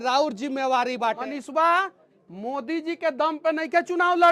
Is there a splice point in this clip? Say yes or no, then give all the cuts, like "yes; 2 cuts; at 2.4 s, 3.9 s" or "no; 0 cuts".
yes; 1 cut; at 1.2 s